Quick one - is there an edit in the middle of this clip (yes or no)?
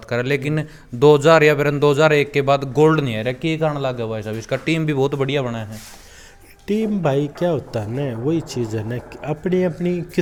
no